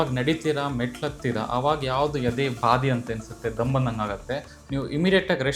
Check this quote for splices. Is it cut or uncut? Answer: uncut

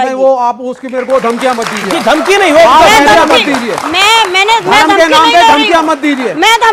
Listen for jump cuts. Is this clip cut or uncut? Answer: uncut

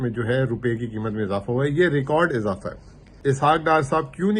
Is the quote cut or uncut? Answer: cut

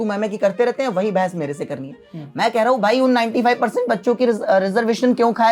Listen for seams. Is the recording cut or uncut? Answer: uncut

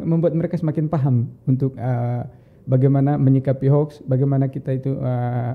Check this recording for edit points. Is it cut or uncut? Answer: uncut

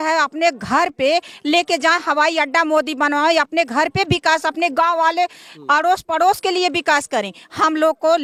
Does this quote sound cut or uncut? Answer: uncut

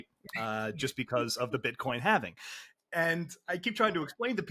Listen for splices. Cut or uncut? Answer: uncut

